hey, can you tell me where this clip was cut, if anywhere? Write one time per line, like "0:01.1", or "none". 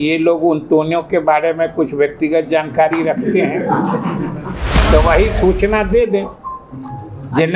0:04.7